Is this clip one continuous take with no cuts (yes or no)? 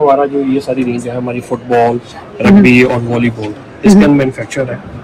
yes